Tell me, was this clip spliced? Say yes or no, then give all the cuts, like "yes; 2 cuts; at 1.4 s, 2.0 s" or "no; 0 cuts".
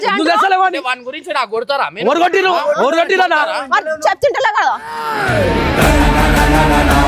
no; 0 cuts